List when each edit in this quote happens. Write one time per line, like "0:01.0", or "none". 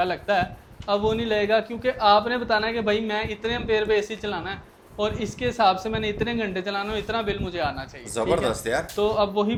none

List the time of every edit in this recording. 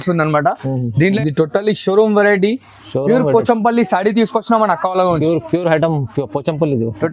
0:01.0

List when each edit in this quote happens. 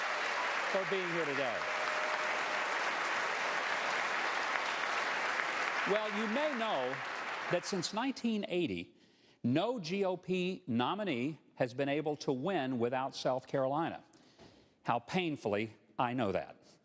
none

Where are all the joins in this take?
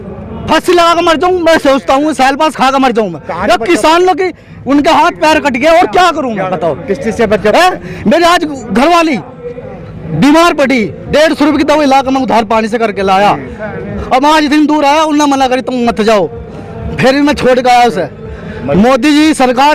none

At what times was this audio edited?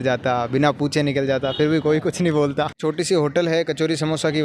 0:02.8

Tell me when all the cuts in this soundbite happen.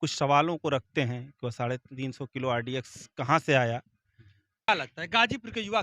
0:04.7

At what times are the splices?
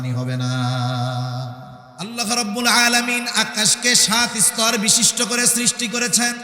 0:02.0

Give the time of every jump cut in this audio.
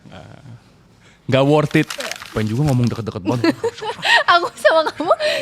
0:02.3

